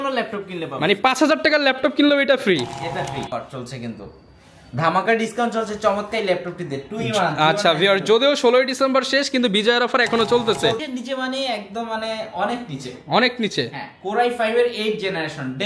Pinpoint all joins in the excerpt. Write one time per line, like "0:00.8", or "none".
0:03.3
0:10.8